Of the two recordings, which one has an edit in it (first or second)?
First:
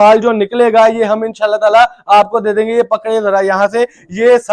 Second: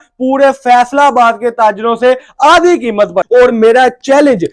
second